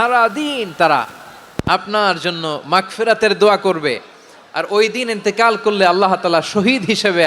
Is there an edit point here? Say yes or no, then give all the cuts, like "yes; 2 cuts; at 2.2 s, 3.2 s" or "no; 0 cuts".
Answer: no; 0 cuts